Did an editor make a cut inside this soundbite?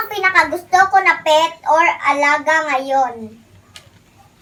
no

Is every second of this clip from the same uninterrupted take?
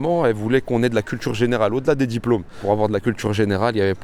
no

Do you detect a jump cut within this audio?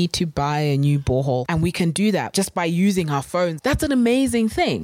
yes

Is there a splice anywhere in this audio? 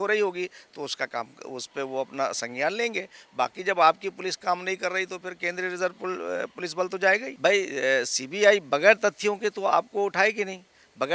yes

